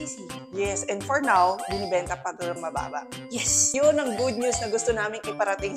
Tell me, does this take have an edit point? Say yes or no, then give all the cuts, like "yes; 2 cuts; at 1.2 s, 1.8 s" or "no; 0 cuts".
yes; 1 cut; at 3.7 s